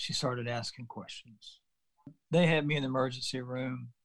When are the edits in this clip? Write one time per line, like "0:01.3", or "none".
0:02.2